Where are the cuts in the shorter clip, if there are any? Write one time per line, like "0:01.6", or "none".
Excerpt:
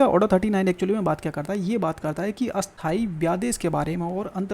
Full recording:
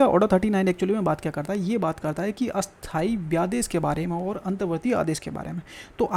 0:02.7